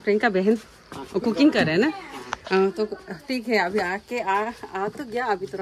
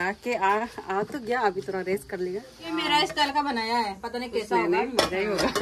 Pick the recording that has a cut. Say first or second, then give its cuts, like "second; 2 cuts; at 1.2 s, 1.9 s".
second; 1 cut; at 2.8 s